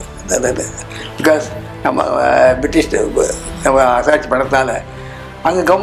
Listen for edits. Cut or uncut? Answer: uncut